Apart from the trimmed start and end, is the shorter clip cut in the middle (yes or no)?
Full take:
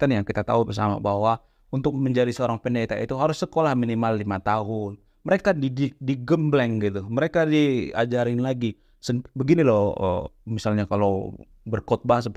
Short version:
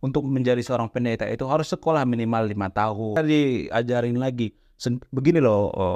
yes